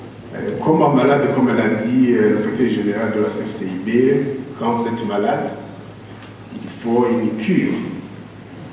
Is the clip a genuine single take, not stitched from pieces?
yes; 0 cuts

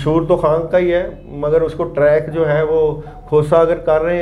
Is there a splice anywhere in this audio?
no; 0 cuts

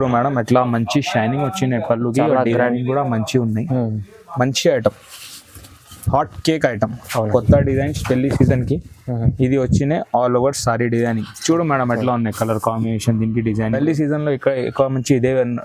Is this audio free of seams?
no; 1 cut; at 13.8 s

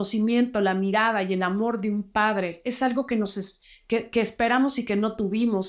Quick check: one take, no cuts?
yes; 0 cuts

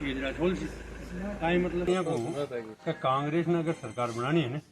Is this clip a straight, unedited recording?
no; 1 cut; at 1.9 s

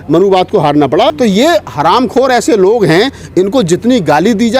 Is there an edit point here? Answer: yes; 1 cut; at 1.1 s

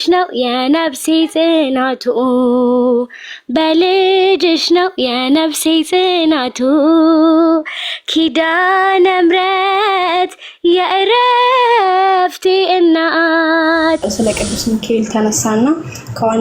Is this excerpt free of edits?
no; 1 cut; at 14.1 s

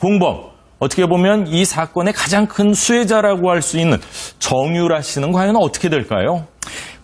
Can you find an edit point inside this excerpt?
no; 0 cuts

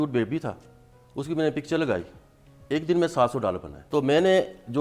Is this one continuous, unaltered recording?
no; 1 cut; at 3.8 s

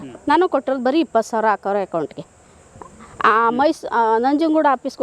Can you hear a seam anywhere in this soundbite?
no; 0 cuts

